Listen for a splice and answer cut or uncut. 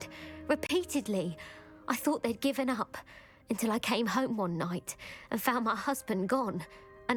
uncut